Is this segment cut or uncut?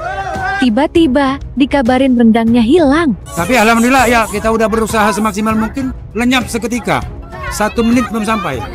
cut